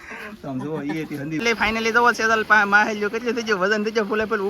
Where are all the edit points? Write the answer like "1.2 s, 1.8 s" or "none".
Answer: 1.4 s

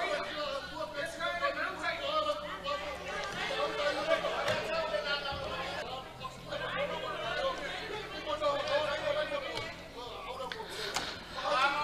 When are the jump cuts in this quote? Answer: 5.8 s

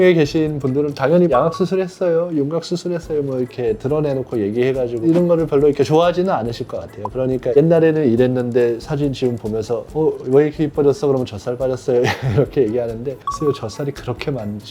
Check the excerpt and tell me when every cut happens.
1.3 s, 7.6 s

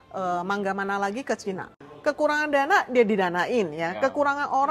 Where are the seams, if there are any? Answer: 1.8 s

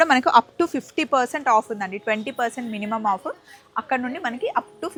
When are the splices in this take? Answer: none

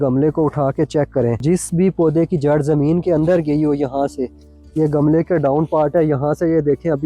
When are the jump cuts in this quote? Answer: 1.4 s

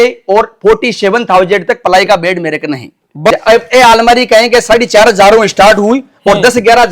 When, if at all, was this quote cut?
3.3 s

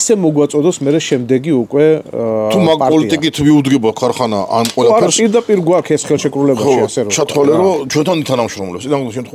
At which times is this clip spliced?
none

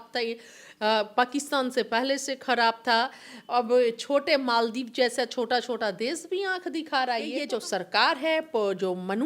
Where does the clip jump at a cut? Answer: 7.4 s

